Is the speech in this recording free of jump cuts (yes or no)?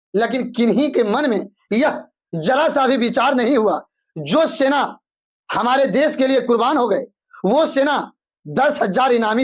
yes